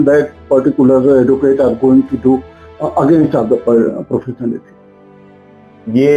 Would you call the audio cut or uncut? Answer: uncut